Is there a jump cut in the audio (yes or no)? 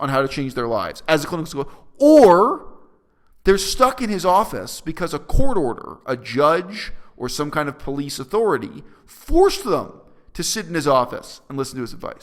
no